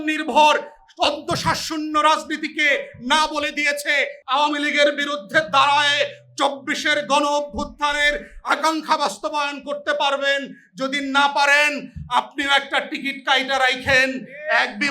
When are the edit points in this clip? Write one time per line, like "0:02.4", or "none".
0:04.2